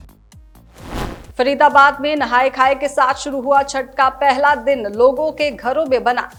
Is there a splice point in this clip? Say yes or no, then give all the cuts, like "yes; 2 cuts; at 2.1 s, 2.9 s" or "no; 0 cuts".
no; 0 cuts